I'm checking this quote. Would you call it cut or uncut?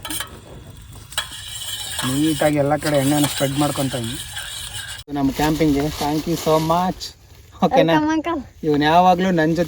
cut